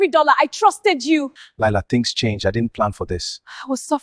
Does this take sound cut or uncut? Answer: cut